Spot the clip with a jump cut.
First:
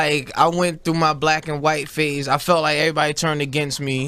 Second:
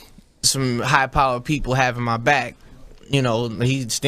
first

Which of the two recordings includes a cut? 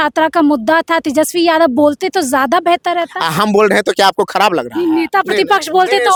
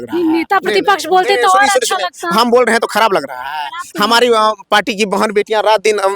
second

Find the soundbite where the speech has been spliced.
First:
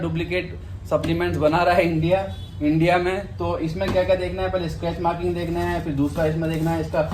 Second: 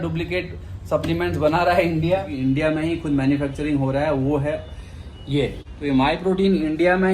second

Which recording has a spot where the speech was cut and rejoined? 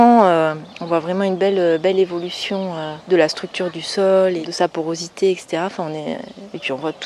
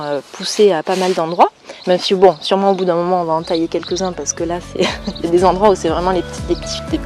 first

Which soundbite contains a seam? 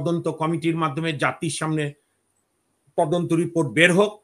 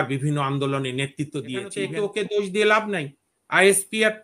second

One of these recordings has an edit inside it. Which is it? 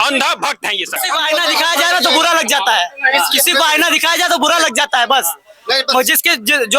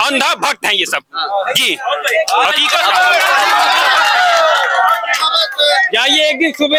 first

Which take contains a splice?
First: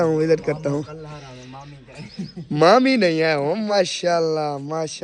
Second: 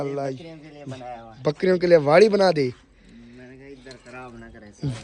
first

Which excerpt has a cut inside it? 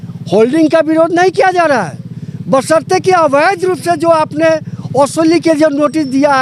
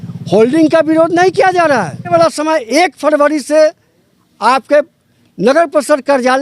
second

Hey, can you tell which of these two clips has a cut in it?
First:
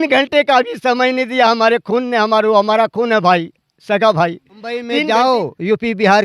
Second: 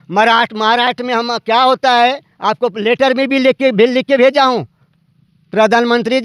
first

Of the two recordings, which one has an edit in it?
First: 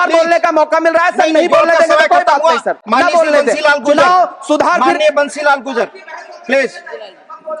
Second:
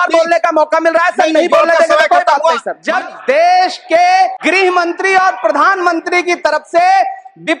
second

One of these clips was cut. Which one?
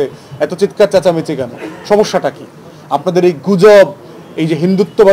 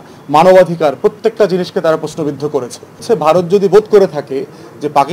second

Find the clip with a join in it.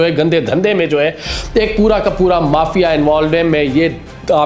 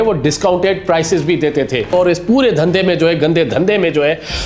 second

